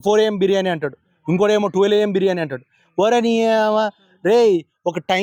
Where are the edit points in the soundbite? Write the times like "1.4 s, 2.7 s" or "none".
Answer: none